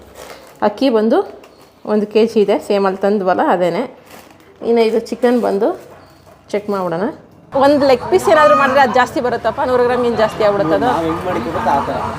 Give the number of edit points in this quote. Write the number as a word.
one